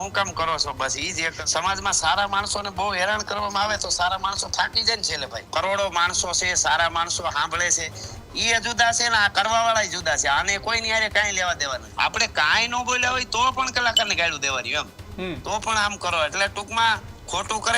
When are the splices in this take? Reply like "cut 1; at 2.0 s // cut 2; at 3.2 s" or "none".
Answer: cut 1; at 1.4 s // cut 2; at 5.5 s // cut 3; at 11.9 s